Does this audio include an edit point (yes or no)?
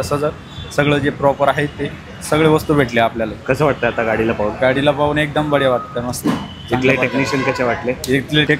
no